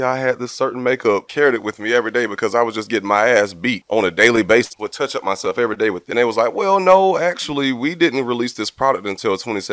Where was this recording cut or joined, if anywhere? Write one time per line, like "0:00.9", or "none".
0:01.3
0:03.8
0:04.8
0:06.0